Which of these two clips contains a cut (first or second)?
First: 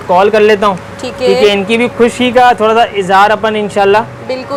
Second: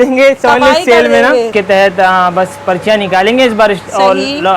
second